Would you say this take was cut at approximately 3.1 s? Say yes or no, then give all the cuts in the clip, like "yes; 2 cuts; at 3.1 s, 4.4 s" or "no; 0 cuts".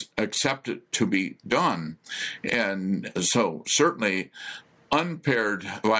no; 0 cuts